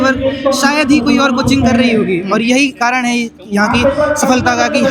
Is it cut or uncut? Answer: uncut